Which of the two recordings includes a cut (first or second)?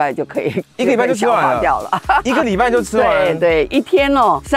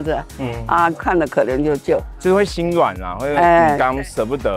second